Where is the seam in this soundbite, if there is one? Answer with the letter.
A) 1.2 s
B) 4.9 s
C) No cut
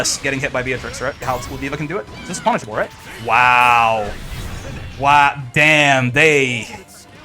A